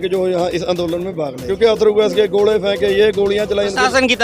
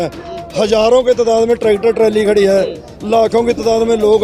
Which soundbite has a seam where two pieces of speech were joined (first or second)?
first